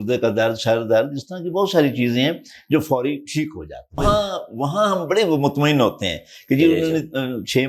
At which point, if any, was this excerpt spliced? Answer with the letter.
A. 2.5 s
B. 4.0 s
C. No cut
B